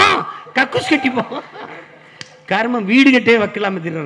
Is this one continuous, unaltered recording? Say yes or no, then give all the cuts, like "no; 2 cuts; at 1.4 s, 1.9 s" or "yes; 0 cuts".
yes; 0 cuts